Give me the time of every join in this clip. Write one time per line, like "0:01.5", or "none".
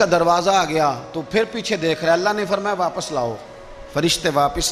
none